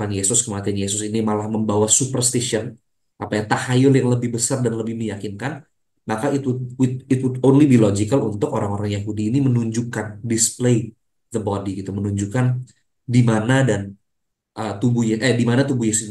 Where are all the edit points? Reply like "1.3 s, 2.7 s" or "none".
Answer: none